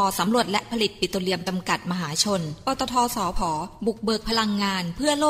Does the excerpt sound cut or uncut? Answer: uncut